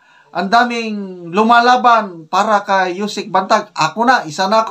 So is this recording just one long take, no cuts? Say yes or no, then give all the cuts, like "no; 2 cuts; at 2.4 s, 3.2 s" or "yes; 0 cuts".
yes; 0 cuts